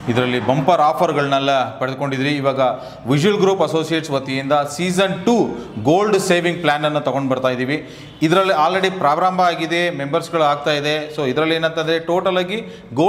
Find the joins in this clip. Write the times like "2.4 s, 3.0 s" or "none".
none